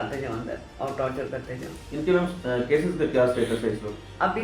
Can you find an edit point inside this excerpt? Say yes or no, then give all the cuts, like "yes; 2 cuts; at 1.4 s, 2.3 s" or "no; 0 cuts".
no; 0 cuts